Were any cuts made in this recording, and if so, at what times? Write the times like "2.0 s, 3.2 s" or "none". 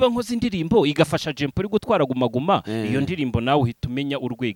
none